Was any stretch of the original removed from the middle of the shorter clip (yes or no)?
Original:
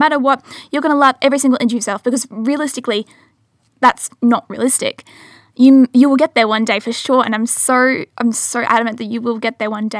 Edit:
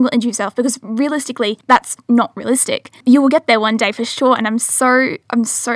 yes